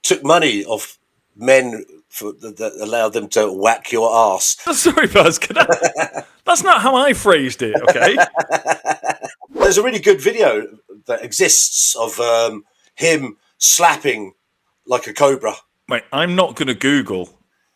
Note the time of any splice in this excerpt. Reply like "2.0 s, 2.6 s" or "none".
4.6 s, 9.6 s, 15.7 s